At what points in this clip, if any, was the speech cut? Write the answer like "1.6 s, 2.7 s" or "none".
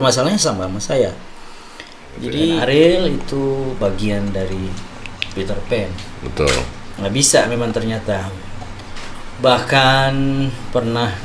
2.5 s